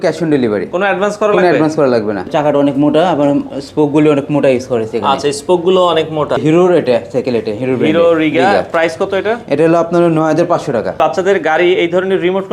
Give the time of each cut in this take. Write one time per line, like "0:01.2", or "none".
0:02.3
0:06.4
0:11.0